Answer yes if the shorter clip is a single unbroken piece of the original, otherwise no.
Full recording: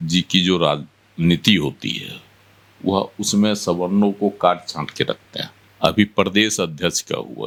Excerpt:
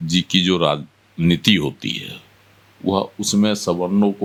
yes